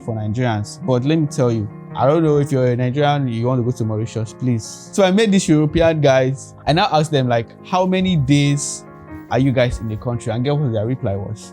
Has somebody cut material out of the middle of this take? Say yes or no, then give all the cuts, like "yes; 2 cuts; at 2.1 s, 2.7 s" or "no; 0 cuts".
yes; 4 cuts; at 1.8 s, 4.8 s, 6.5 s, 7.6 s